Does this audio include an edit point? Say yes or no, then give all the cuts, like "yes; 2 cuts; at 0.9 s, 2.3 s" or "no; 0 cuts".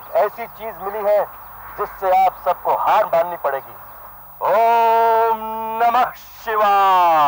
no; 0 cuts